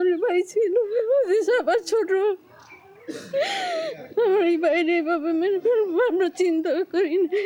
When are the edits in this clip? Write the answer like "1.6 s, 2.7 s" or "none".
none